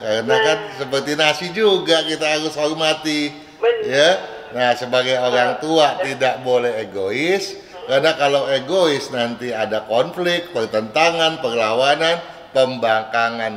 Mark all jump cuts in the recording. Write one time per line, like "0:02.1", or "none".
none